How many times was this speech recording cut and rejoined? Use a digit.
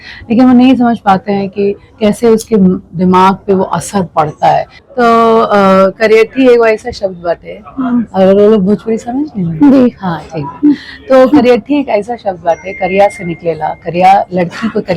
1